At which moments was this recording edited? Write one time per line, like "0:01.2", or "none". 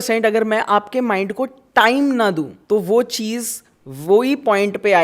0:02.6